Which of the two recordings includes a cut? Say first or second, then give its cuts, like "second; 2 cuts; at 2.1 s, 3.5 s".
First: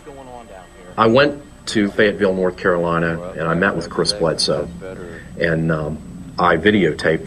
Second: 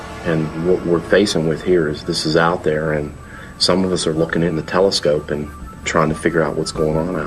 second; 1 cut; at 4.5 s